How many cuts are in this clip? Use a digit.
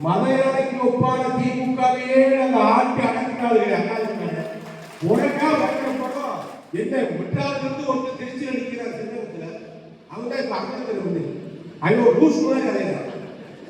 1